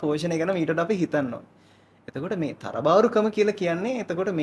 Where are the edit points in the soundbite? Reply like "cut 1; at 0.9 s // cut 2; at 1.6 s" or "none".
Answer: none